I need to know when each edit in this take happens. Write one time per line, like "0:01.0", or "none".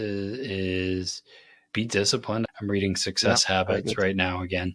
0:02.5